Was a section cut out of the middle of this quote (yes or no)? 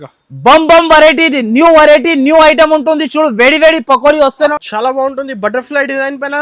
yes